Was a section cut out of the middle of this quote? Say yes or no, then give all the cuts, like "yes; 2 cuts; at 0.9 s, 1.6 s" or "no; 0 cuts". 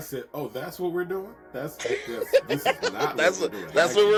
no; 0 cuts